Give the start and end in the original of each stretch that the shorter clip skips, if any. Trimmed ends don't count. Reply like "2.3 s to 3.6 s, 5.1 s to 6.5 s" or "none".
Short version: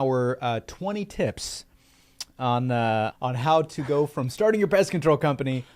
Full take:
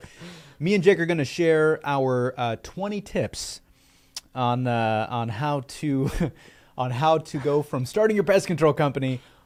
5.1 s to 6.7 s